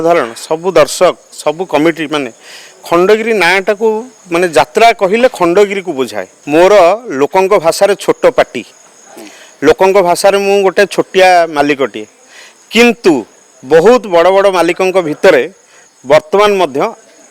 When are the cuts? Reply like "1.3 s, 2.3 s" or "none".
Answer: 6.3 s